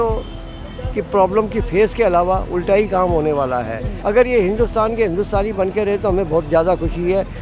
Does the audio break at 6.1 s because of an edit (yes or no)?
no